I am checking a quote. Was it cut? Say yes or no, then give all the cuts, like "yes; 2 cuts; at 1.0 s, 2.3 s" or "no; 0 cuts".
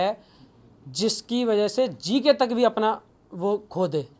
no; 0 cuts